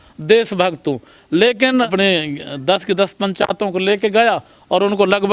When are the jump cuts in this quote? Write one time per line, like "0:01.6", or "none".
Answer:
0:01.9